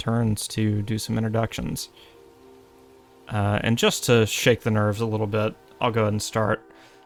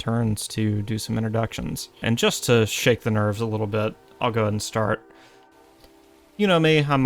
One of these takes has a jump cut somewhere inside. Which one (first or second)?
second